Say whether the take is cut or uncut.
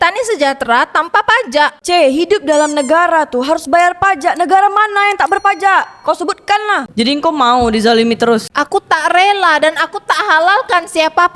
cut